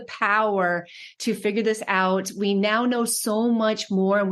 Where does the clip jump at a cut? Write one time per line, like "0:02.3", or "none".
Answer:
none